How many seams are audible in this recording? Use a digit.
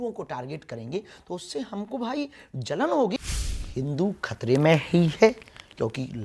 1